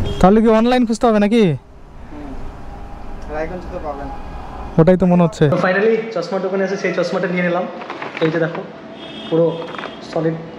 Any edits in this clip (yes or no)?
yes